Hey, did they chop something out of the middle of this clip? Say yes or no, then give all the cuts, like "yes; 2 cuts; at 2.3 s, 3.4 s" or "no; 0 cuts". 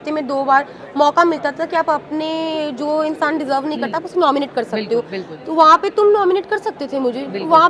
no; 0 cuts